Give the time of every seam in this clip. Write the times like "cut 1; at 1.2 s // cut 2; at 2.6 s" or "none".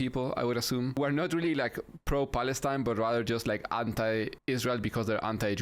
cut 1; at 0.9 s // cut 2; at 4.4 s